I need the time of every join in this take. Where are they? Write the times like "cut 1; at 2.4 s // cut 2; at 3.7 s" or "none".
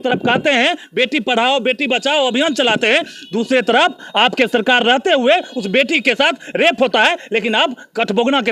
none

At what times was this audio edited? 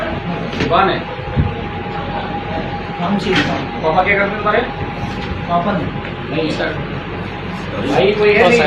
none

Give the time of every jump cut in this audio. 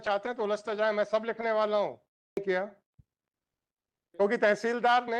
cut 1; at 2.4 s

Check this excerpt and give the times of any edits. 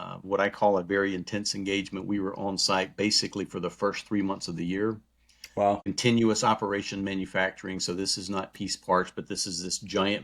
cut 1; at 5.5 s

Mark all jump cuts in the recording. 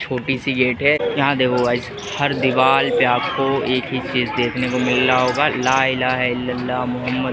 cut 1; at 1.0 s

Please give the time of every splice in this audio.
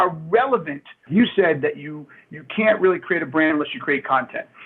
cut 1; at 1.1 s

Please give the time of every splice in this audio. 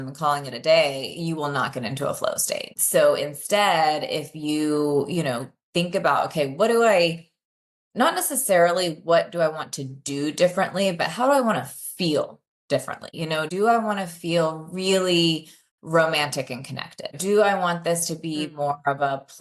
cut 1; at 2.7 s // cut 2; at 13.1 s // cut 3; at 17.2 s

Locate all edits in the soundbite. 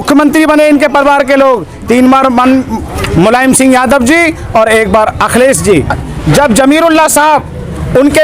cut 1; at 6.1 s

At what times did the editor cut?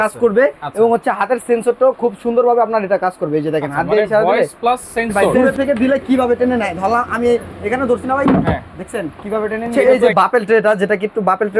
cut 1; at 5.3 s // cut 2; at 9.9 s

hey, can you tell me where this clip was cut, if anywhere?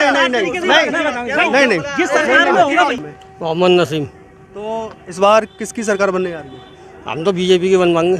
cut 1; at 3.0 s

